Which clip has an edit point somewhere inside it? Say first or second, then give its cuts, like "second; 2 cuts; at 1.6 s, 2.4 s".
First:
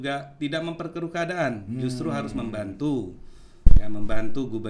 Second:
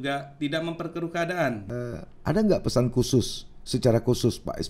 second; 1 cut; at 1.6 s